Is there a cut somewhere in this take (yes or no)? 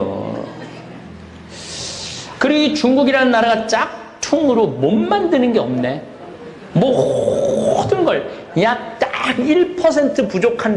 yes